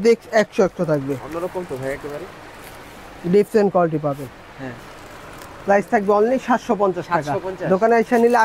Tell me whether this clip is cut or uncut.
uncut